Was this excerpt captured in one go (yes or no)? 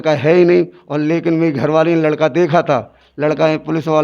yes